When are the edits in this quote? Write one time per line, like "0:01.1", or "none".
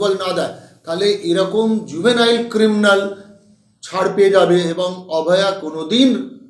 none